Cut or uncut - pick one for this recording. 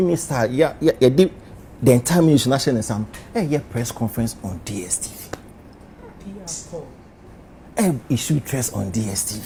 uncut